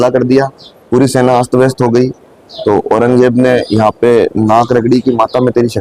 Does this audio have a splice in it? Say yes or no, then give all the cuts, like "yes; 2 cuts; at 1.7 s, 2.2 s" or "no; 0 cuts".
no; 0 cuts